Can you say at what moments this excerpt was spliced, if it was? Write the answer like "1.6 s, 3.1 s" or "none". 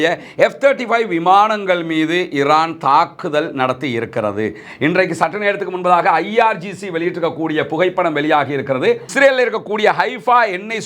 9.1 s